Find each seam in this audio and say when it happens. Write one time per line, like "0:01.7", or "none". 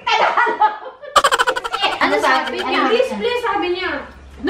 0:02.0